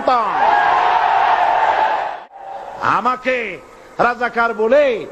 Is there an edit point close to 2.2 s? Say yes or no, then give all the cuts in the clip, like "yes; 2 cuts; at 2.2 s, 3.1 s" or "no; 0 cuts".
yes; 1 cut; at 2.2 s